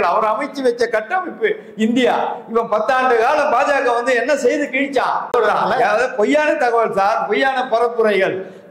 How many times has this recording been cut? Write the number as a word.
one